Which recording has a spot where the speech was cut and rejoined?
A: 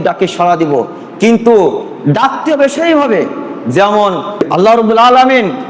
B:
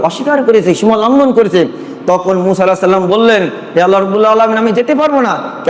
A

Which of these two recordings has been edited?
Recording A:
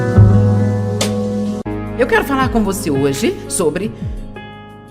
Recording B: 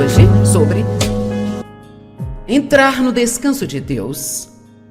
B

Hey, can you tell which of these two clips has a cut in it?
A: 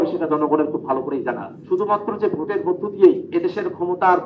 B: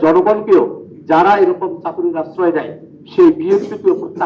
A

